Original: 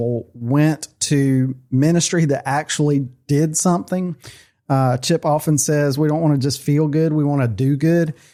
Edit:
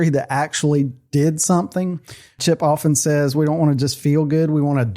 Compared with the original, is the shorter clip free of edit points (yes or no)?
no